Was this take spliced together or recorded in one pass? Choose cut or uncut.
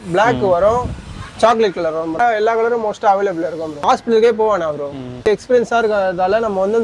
cut